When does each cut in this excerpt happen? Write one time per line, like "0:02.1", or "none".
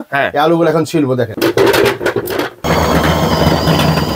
0:01.3
0:02.7